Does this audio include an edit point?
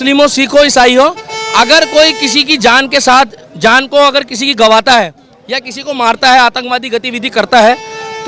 no; 0 cuts

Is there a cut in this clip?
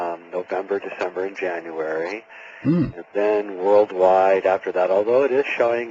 no; 0 cuts

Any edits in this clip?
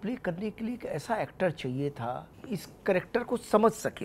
yes; 1 cut; at 2.3 s

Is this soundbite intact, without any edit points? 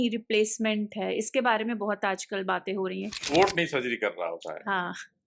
no; 1 cut; at 3.3 s

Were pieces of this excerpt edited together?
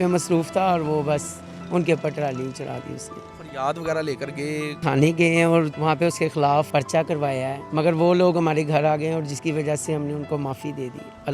yes; 5 cuts; at 3.3 s, 4.8 s, 5.7 s, 6.7 s, 7.6 s

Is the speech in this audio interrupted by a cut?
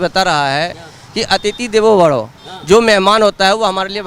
no; 0 cuts

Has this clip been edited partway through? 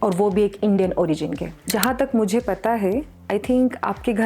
yes; 1 cut; at 1.7 s

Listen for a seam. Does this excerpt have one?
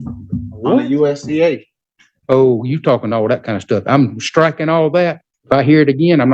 yes; 1 cut; at 5.3 s

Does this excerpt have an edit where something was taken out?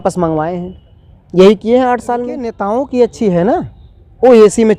yes; 1 cut; at 2.6 s

